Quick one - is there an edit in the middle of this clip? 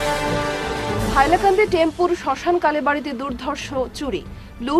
yes; 1 cut; at 1.0 s

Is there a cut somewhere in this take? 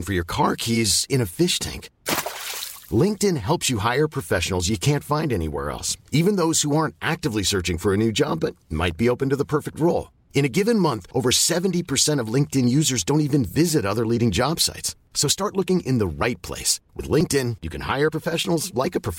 no; 0 cuts

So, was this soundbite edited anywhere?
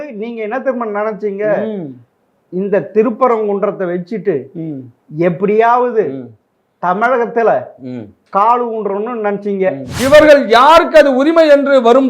yes; 1 cut; at 9.9 s

